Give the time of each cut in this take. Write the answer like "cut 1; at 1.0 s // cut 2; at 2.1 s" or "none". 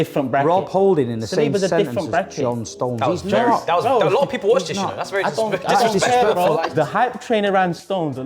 cut 1; at 6.7 s